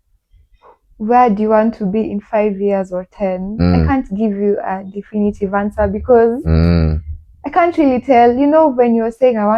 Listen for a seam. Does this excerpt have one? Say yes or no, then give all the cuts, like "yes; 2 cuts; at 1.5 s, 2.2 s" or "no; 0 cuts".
no; 0 cuts